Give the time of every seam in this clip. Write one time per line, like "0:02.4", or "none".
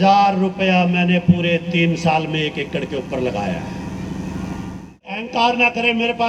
0:05.0

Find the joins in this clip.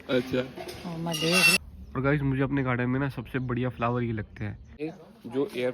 0:01.6
0:04.8

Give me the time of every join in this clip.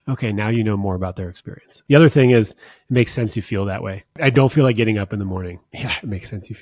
0:01.7
0:04.2

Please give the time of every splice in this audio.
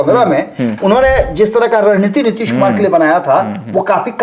none

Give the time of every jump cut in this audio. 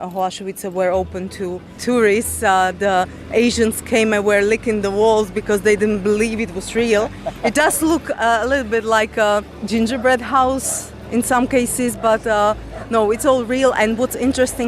0:01.8
0:09.6

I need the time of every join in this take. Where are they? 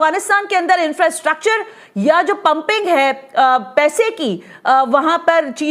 none

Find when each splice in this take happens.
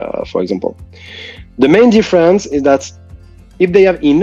none

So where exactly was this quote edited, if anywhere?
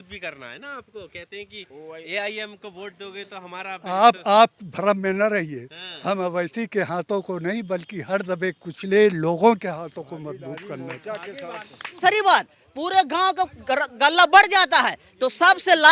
0:12.0

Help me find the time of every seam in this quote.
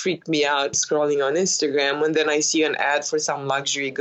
none

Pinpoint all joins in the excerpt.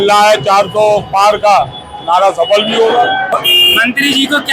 none

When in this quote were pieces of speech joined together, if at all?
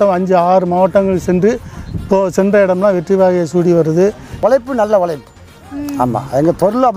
0:04.4

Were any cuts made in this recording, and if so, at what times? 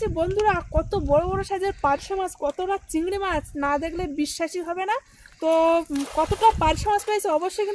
none

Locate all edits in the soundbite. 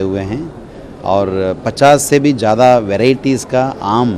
none

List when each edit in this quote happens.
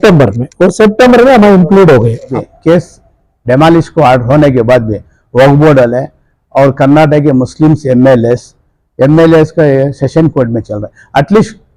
0:02.3

